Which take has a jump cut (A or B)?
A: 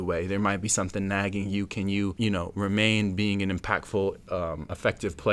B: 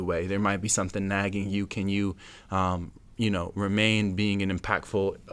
A